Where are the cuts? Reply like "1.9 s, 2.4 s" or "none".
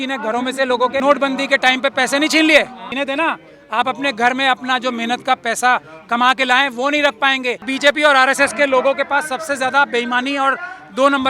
1.0 s, 2.8 s, 7.7 s